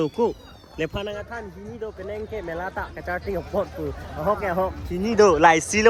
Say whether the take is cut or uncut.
uncut